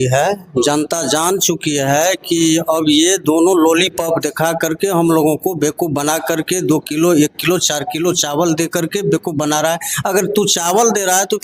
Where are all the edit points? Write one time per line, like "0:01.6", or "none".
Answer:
none